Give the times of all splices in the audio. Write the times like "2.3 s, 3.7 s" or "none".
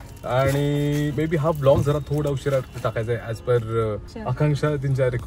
4.1 s